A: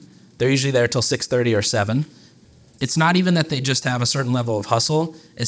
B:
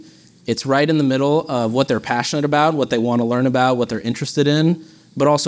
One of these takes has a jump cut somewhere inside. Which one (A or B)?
A